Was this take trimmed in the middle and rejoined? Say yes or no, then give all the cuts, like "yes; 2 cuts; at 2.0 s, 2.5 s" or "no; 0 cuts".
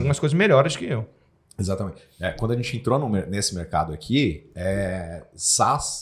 no; 0 cuts